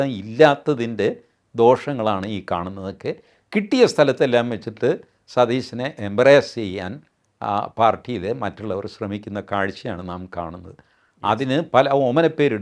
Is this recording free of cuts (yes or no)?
yes